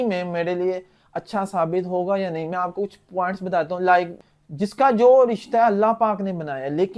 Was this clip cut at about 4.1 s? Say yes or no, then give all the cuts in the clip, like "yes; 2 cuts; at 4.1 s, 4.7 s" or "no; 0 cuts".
yes; 1 cut; at 4.1 s